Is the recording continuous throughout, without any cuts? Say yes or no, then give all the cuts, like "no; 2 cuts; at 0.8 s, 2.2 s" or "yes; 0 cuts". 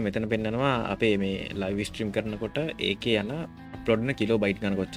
yes; 0 cuts